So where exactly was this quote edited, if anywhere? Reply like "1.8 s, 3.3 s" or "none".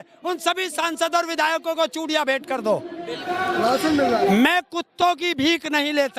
3.2 s